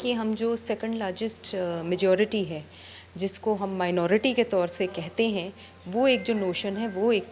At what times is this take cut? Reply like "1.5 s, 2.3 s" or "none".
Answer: none